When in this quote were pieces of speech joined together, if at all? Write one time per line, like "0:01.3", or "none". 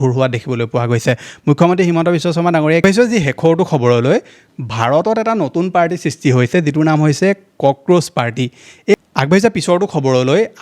0:02.8
0:08.9

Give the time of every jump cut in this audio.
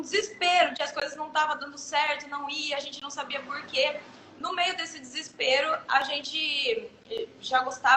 none

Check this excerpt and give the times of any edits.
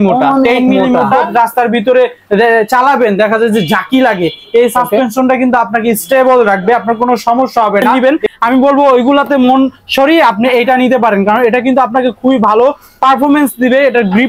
0:01.3
0:08.0

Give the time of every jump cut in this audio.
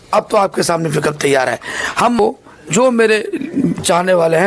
0:02.2

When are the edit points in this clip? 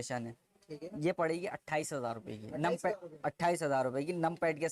none

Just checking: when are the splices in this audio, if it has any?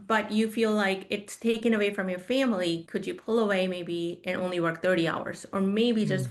none

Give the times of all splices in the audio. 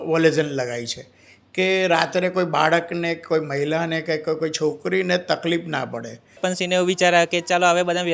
0:06.6

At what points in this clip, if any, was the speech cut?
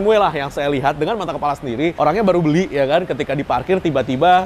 none

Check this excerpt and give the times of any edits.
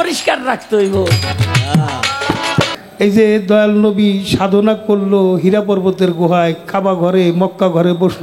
0:02.8

